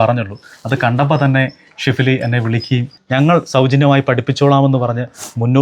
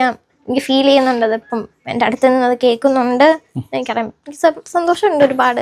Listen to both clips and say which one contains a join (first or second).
first